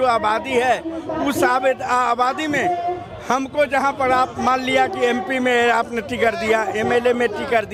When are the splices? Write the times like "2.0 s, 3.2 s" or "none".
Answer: none